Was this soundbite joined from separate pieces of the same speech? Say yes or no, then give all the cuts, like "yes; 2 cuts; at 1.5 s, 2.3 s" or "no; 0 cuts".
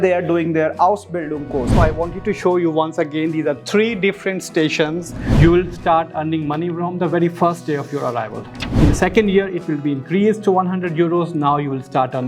yes; 2 cuts; at 1.8 s, 5.2 s